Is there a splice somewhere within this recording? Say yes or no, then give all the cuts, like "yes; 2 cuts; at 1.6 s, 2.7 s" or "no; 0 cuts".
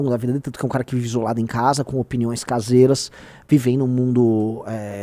no; 0 cuts